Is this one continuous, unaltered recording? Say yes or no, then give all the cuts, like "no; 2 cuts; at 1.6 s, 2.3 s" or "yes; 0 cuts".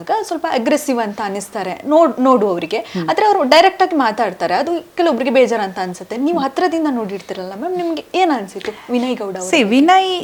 yes; 0 cuts